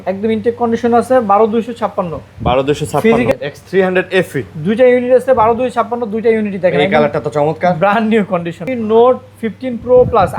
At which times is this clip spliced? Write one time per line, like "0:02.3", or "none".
0:03.3
0:08.6